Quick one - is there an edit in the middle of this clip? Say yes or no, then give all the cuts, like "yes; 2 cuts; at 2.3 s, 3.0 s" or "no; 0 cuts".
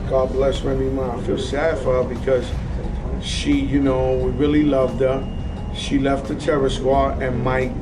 no; 0 cuts